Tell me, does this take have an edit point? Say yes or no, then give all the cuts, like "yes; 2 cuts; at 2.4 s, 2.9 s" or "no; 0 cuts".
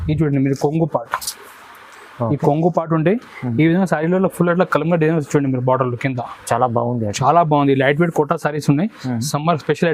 no; 0 cuts